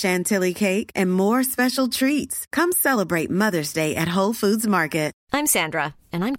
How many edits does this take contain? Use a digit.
1